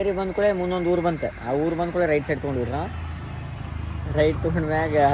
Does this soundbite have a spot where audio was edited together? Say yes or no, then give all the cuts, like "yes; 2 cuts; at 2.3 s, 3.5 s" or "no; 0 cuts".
no; 0 cuts